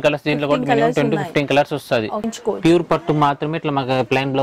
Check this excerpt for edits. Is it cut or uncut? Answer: cut